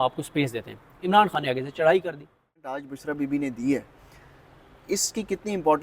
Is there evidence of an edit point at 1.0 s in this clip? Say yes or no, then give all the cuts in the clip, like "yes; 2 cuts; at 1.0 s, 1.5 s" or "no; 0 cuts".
no; 1 cut; at 2.8 s